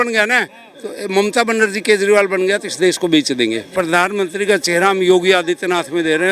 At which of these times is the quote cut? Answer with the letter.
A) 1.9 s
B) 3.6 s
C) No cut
B